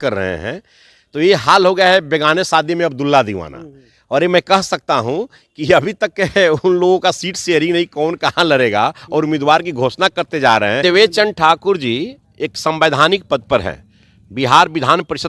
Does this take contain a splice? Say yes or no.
yes